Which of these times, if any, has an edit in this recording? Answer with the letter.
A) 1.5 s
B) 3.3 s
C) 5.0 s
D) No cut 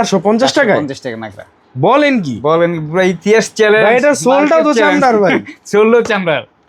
D